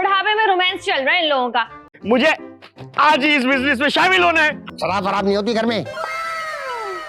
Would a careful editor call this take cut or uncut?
cut